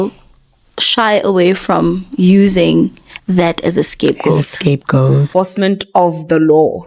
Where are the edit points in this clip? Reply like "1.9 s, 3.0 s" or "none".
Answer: 5.3 s